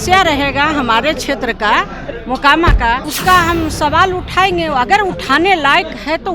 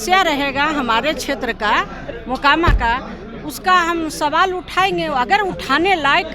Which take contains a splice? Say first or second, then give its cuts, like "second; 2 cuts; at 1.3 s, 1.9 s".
first; 1 cut; at 3.1 s